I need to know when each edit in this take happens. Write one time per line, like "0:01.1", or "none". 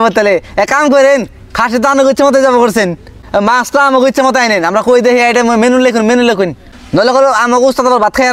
0:03.2
0:06.7